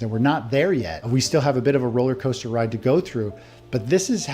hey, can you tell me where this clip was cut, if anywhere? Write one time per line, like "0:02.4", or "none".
0:01.0